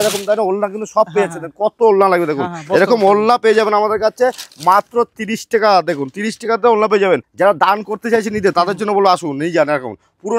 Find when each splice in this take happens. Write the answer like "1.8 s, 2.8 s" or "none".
7.3 s